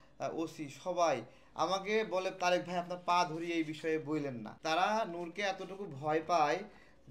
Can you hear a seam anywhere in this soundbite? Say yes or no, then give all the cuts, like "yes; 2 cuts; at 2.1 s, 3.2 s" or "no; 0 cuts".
yes; 1 cut; at 4.5 s